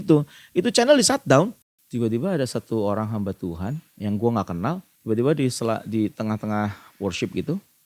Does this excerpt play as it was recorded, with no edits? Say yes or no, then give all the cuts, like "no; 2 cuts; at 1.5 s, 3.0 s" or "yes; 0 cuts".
no; 2 cuts; at 1.7 s, 4.9 s